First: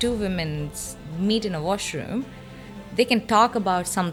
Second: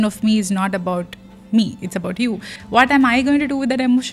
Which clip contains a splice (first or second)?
second